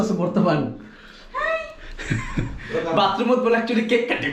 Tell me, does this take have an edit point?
no; 0 cuts

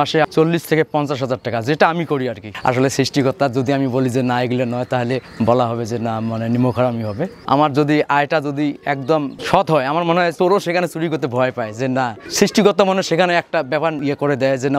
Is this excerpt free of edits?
no; 6 cuts; at 2.5 s, 7.4 s, 9.4 s, 10.3 s, 12.2 s, 14.0 s

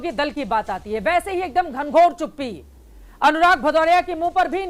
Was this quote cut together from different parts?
no; 0 cuts

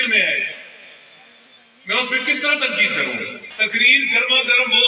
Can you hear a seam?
yes; 1 cut; at 3.4 s

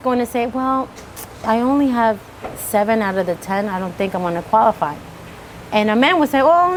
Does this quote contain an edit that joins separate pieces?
no; 0 cuts

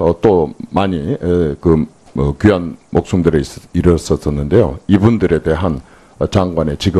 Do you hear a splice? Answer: no; 0 cuts

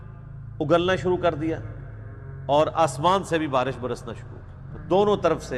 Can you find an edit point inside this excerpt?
no; 0 cuts

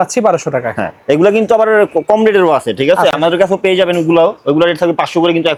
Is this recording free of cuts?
yes; 0 cuts

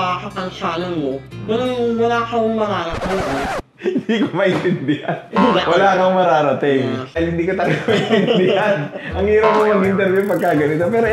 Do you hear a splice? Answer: yes; 1 cut; at 7.1 s

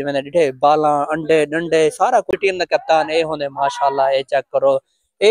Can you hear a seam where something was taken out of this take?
yes; 1 cut; at 2.3 s

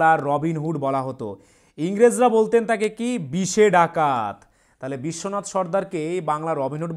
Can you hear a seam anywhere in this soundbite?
no; 0 cuts

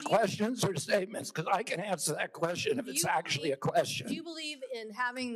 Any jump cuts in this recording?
no; 0 cuts

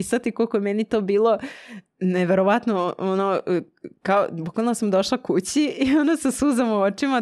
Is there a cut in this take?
no; 0 cuts

